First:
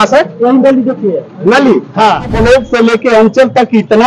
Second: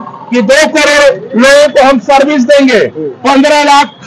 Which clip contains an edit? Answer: first; 1 cut; at 2.4 s

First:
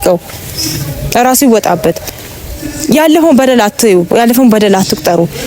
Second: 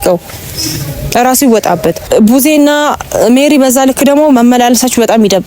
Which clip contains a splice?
second; 1 cut; at 2.0 s

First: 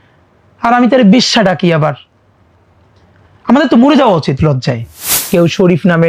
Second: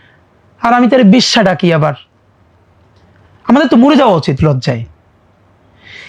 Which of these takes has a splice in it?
first; 1 cut; at 5.1 s

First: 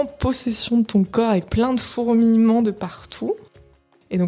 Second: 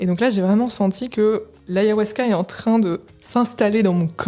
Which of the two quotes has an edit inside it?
second; 2 cuts; at 1.5 s, 3.1 s

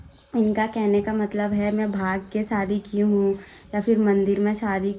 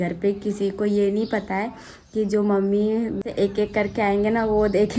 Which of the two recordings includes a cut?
second; 1 cut; at 3.2 s

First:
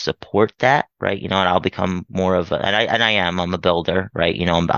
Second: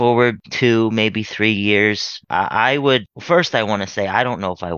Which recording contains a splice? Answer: second; 2 cuts; at 2.2 s, 3.1 s

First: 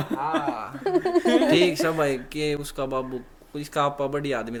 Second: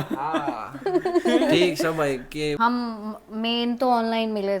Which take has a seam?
second; 1 cut; at 2.6 s

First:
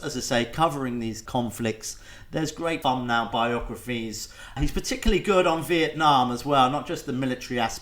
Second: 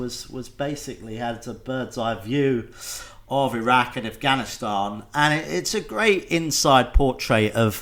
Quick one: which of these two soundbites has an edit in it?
first; 3 cuts; at 1.2 s, 2.8 s, 4.6 s

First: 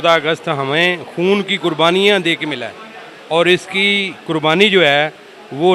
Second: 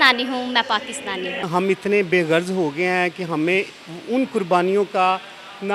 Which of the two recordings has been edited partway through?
second; 1 cut; at 1.4 s

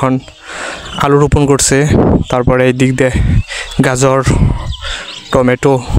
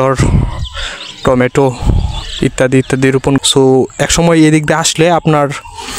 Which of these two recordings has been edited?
second; 1 cut; at 3.4 s

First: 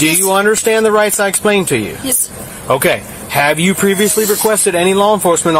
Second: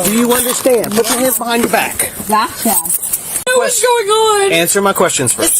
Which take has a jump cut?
second; 1 cut; at 3.5 s

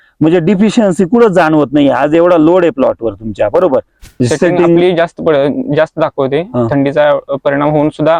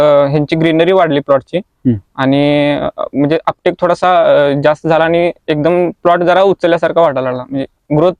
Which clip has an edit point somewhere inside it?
first; 1 cut; at 4.0 s

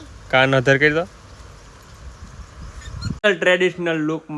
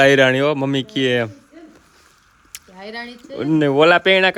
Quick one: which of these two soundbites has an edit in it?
first; 1 cut; at 3.2 s

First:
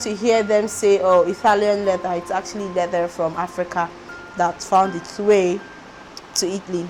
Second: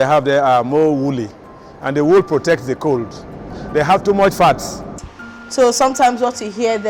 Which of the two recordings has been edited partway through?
second; 2 cuts; at 3.6 s, 5.0 s

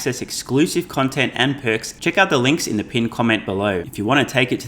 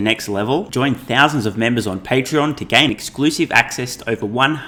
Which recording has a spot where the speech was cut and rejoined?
first; 2 cuts; at 1.9 s, 3.9 s

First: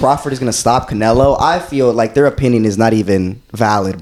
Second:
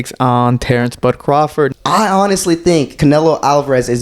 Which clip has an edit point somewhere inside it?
second; 2 cuts; at 1.7 s, 2.9 s

